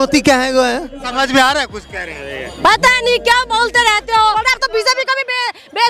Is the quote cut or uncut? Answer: cut